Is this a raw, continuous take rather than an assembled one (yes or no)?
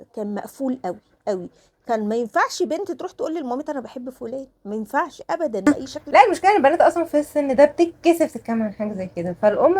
no